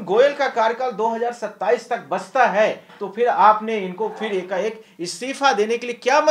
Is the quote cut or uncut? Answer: uncut